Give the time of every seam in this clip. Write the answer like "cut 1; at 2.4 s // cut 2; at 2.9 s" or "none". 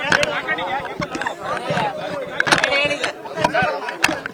none